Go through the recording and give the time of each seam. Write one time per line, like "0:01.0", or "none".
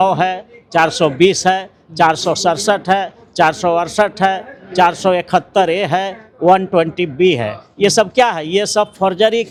none